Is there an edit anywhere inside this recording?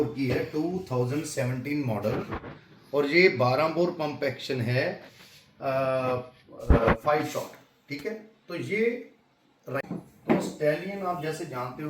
yes; 1 cut; at 9.8 s

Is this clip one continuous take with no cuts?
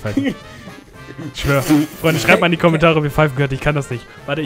yes; 0 cuts

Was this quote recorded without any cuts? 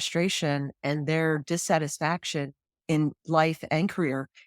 no; 1 cut; at 2.7 s

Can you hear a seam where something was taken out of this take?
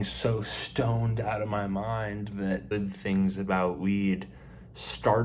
yes; 1 cut; at 2.7 s

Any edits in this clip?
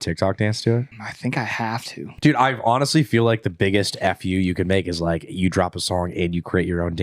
yes; 2 cuts; at 1.0 s, 2.1 s

